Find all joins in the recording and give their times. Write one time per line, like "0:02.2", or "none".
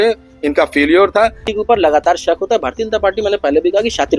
0:01.5